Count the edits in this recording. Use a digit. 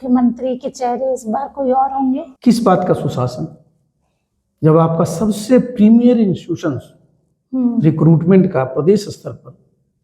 1